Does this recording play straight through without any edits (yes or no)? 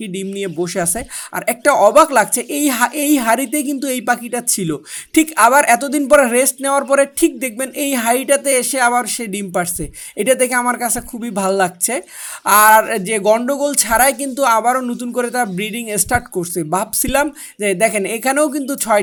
yes